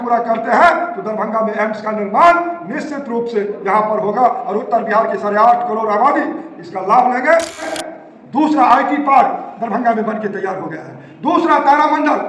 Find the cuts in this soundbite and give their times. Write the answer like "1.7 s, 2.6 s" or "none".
7.7 s

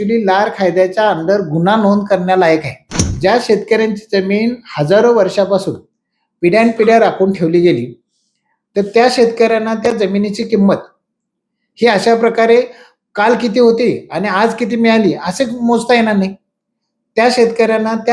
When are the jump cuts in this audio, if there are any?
3.0 s

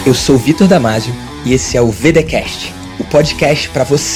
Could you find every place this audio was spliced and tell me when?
none

